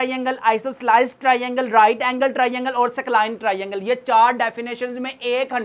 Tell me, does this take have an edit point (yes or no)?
no